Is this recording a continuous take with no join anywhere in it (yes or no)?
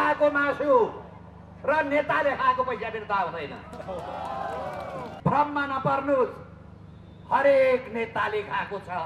no